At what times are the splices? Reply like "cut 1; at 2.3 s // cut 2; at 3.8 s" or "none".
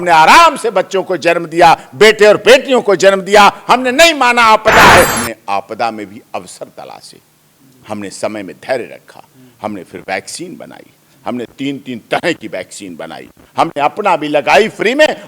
cut 1; at 5.1 s